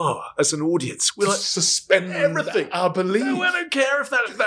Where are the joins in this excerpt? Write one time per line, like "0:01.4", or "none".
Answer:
none